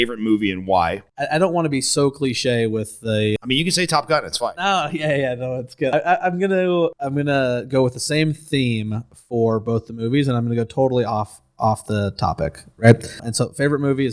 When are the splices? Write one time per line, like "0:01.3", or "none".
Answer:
0:01.1